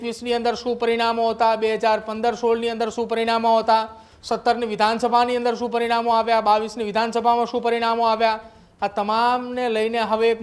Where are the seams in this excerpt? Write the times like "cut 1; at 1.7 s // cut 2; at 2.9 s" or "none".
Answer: none